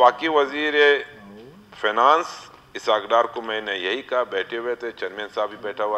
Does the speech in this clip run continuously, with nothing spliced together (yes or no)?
yes